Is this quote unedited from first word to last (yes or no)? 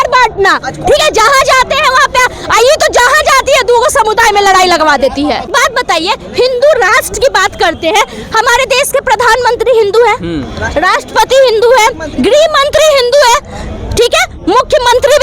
no